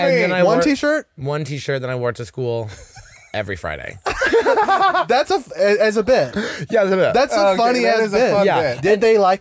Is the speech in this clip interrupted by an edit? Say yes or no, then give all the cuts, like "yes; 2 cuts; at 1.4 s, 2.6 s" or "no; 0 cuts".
no; 0 cuts